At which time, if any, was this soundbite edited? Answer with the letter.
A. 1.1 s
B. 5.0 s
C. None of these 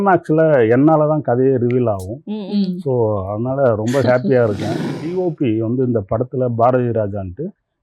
B